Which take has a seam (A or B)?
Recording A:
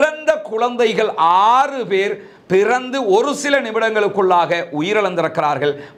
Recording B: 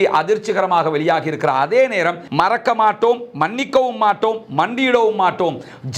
B